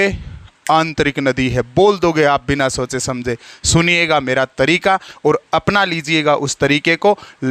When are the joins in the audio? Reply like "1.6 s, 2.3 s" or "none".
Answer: none